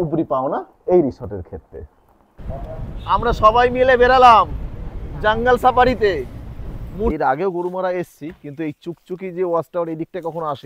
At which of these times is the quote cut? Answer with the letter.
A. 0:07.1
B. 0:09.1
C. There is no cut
A